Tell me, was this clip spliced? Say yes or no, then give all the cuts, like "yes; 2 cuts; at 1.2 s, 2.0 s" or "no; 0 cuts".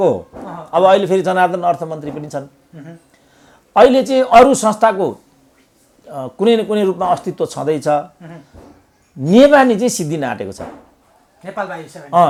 no; 0 cuts